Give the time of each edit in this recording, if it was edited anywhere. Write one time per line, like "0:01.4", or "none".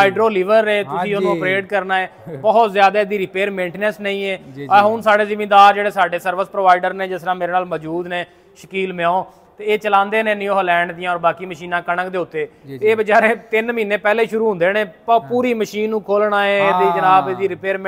none